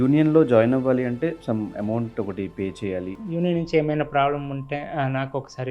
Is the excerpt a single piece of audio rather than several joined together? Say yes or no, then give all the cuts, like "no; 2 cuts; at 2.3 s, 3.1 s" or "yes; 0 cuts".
no; 1 cut; at 3.2 s